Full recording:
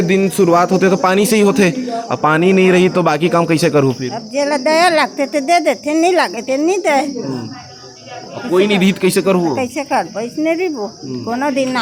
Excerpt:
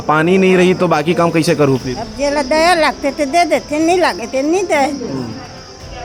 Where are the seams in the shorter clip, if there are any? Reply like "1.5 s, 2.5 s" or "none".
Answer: none